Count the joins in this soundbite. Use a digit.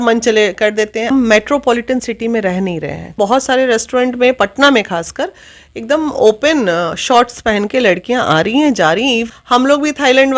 3